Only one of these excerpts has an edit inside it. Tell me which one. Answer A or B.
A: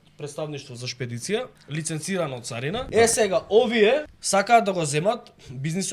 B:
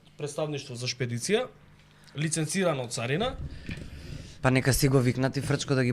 A